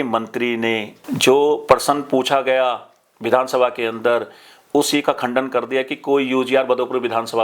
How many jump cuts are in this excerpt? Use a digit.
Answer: 1